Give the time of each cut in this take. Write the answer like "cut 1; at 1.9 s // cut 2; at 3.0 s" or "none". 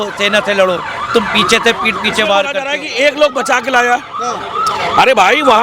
cut 1; at 2.6 s